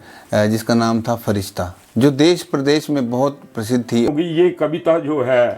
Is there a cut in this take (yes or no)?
yes